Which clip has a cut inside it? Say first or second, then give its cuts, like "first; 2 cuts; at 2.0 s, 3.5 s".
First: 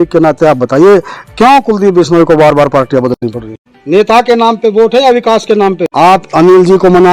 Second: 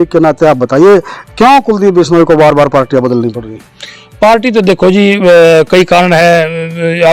first; 2 cuts; at 3.2 s, 5.8 s